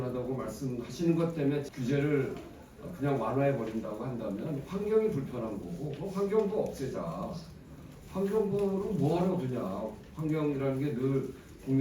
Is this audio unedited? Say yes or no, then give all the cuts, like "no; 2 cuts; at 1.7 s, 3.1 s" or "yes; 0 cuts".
no; 1 cut; at 1.7 s